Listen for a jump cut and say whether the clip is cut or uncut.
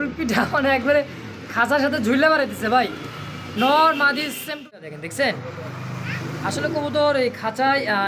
cut